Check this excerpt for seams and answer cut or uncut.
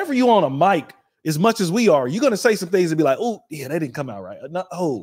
uncut